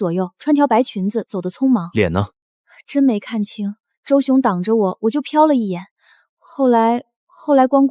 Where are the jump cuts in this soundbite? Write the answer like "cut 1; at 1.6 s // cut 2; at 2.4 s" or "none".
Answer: none